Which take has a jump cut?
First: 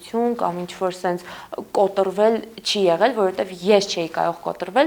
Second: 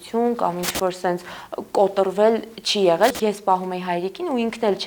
second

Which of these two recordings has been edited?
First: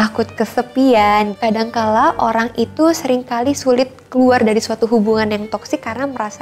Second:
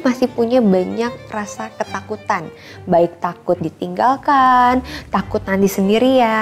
first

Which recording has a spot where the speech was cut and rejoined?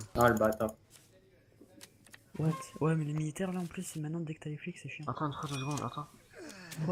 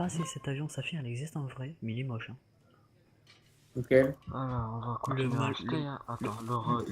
second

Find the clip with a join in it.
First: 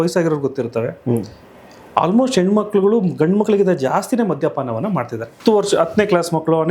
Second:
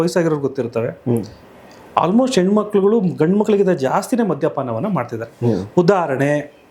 first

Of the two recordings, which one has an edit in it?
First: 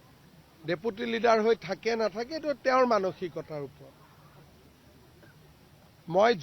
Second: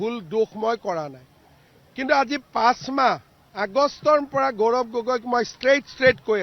first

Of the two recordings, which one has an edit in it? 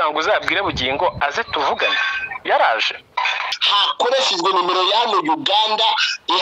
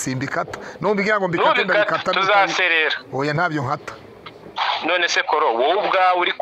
first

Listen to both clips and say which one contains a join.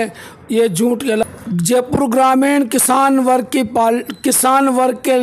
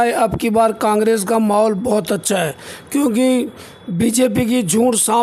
first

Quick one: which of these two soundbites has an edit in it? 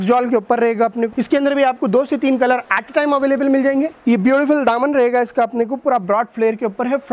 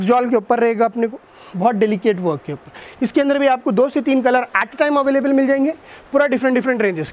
first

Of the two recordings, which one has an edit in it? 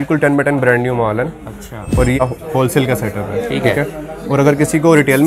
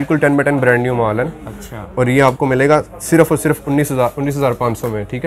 first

